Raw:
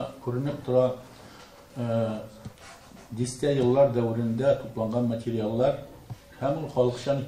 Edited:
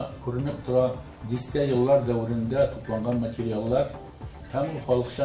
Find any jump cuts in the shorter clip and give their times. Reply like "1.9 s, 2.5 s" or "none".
1.1 s